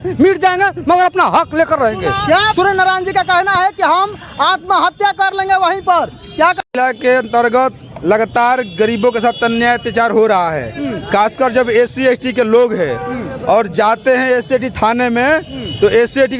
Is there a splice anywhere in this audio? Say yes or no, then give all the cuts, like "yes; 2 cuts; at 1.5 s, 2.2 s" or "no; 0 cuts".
yes; 2 cuts; at 2.5 s, 6.6 s